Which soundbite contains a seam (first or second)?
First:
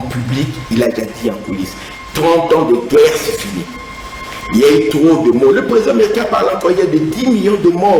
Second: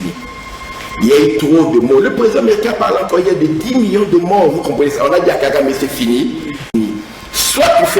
second